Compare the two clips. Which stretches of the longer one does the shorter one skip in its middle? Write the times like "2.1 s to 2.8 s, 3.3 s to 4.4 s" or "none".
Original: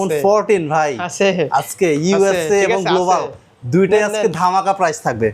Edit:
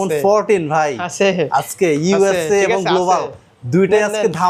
none